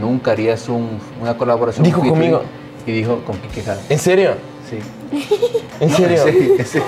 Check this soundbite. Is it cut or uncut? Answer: uncut